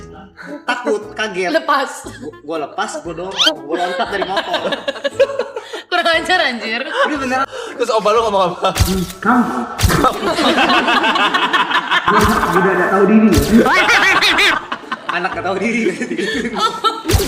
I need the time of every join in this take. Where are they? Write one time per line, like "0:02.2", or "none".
0:07.4